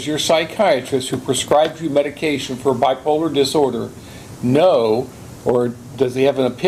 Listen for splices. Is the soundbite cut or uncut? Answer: uncut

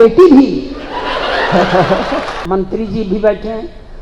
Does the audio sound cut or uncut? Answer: cut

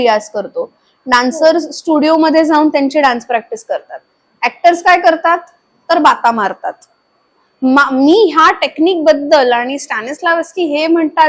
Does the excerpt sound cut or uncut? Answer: uncut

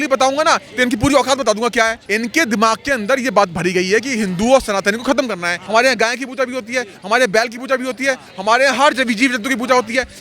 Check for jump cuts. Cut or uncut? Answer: cut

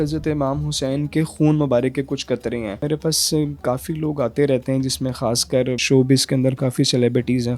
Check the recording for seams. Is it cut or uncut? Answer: cut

